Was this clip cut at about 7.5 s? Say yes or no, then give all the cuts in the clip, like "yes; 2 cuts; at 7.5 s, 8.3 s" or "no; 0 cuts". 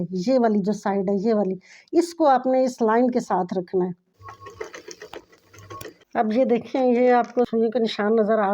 yes; 2 cuts; at 4.1 s, 7.5 s